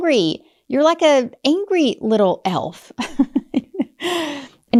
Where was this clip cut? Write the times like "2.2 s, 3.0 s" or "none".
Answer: none